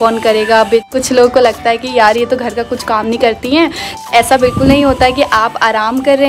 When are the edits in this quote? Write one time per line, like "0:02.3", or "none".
0:00.9
0:04.1